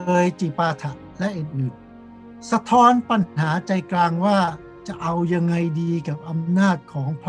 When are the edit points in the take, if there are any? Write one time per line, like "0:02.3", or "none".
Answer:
none